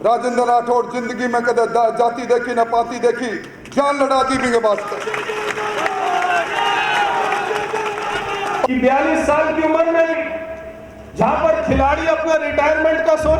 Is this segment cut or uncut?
cut